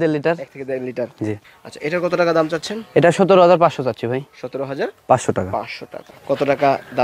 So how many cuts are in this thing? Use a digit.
2